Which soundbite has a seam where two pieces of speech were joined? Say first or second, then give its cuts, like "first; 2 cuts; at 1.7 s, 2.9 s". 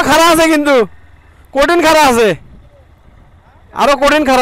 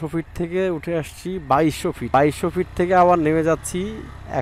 second; 1 cut; at 2.1 s